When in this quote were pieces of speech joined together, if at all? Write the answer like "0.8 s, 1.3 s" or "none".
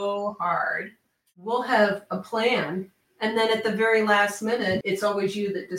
1.0 s, 3.1 s, 4.8 s